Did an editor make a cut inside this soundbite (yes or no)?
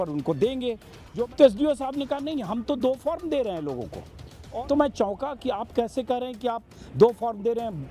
yes